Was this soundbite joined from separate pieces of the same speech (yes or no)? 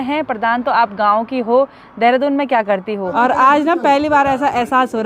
yes